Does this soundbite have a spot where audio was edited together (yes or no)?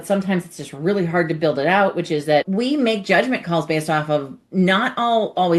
yes